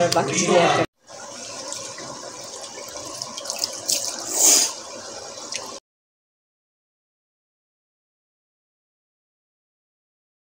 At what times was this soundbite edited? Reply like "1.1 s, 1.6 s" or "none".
none